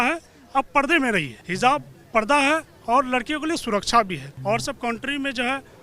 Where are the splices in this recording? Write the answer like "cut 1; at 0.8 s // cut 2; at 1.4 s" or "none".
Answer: cut 1; at 1.4 s // cut 2; at 4.3 s